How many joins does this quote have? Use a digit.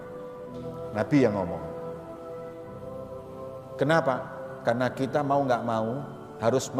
2